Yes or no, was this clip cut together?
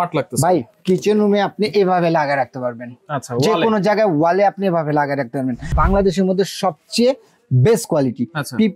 yes